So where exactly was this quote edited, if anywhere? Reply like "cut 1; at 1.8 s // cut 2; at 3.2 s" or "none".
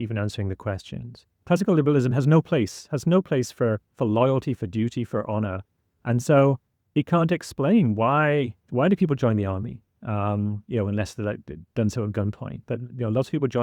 cut 1; at 1.3 s

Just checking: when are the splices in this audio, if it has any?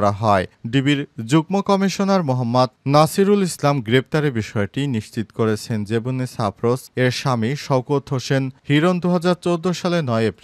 none

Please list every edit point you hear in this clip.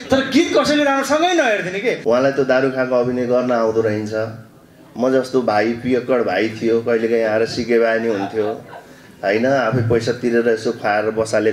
cut 1; at 2.0 s

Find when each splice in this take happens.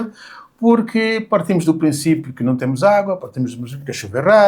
none

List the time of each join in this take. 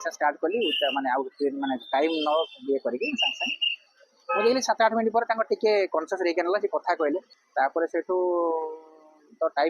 cut 1; at 7.4 s

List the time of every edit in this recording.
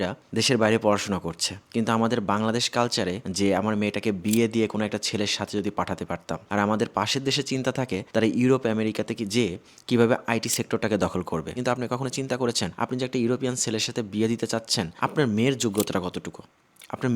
cut 1; at 3.2 s // cut 2; at 6.5 s // cut 3; at 11.5 s

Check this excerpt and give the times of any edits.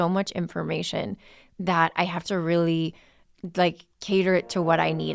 none

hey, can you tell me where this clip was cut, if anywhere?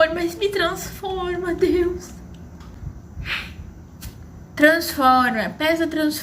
cut 1; at 2.8 s

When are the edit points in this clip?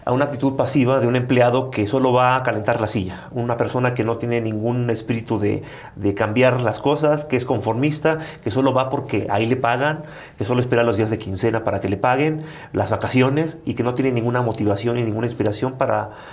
none

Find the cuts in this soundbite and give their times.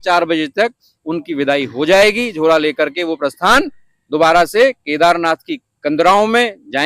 none

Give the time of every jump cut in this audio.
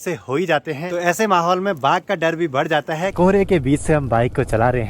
cut 1; at 0.9 s // cut 2; at 3.1 s

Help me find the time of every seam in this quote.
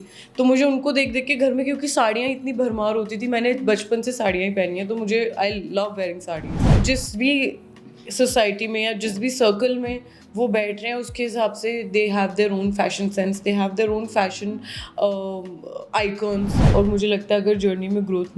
cut 1; at 6.5 s // cut 2; at 16.6 s

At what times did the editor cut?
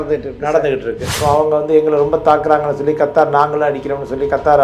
cut 1; at 1.1 s

